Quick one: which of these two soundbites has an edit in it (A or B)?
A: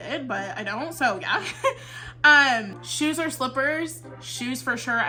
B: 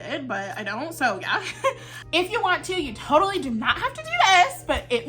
B